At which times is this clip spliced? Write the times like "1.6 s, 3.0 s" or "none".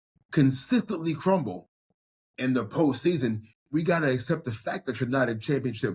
3.5 s